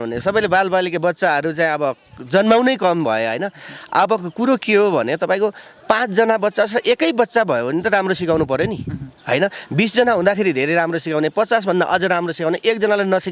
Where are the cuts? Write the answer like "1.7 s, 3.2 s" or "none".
none